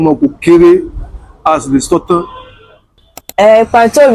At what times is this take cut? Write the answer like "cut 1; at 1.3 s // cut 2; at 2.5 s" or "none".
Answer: cut 1; at 3.2 s